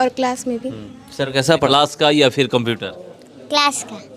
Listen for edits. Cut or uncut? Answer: cut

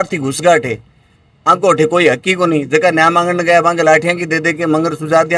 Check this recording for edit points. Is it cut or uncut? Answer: uncut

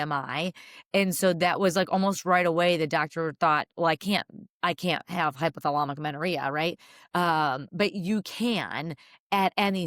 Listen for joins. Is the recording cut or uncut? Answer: uncut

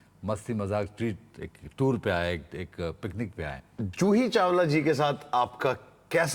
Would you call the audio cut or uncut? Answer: cut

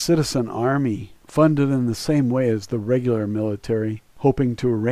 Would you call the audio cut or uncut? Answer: cut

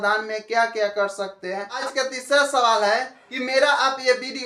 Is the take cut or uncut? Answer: cut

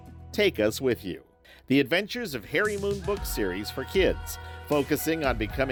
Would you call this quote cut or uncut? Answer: uncut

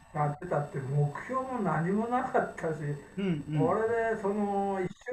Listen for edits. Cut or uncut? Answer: uncut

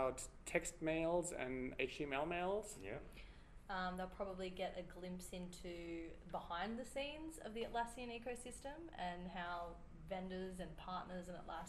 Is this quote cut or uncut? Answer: uncut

